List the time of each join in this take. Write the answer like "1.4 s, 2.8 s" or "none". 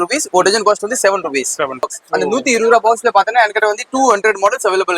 1.9 s